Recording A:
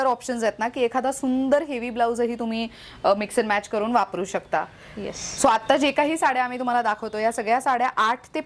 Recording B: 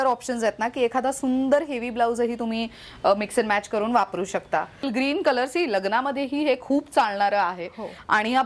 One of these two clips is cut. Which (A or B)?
B